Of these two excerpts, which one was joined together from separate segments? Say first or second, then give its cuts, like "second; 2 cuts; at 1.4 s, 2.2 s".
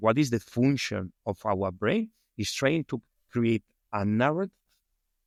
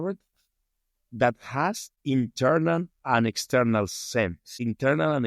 second; 1 cut; at 1.9 s